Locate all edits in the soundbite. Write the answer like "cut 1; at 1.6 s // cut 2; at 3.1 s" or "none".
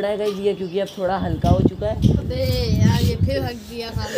cut 1; at 2.2 s